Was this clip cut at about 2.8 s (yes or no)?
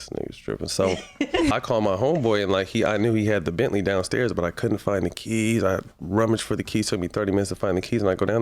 no